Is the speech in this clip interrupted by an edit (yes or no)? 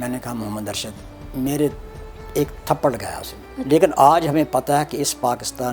yes